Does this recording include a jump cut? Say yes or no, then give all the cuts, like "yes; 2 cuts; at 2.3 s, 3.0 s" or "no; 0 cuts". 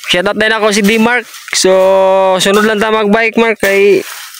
no; 0 cuts